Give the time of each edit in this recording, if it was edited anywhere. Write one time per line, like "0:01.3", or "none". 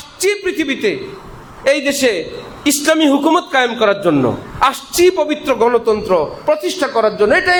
none